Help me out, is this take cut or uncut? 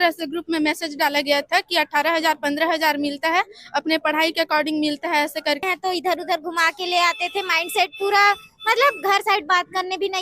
cut